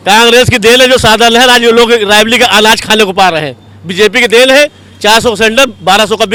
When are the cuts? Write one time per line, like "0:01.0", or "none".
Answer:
none

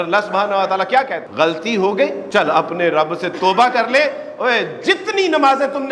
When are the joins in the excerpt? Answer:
0:01.2
0:02.2

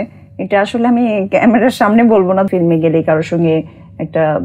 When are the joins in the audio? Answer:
0:02.5

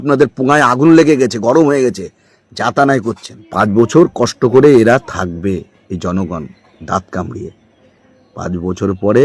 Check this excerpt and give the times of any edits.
0:03.3

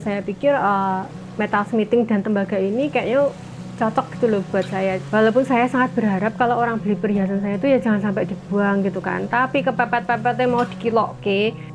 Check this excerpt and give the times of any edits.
0:05.0

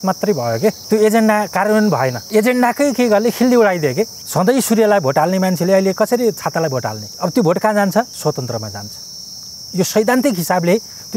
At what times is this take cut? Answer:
0:00.8
0:02.2
0:04.2
0:07.0
0:08.1

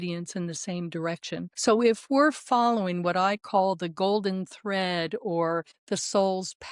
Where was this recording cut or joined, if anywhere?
0:01.5
0:05.7

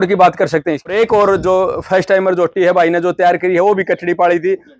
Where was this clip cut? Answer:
0:00.9

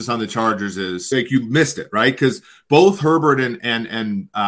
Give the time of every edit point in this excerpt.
0:01.1

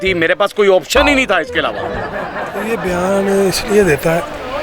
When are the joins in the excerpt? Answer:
none

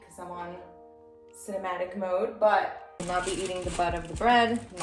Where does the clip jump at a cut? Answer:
0:02.9

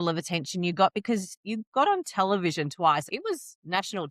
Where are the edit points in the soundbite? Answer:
0:01.4
0:03.1

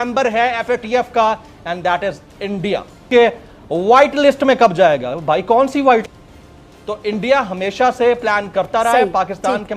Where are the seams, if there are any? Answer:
0:03.1
0:06.1

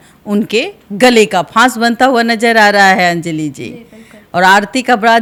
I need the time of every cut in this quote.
none

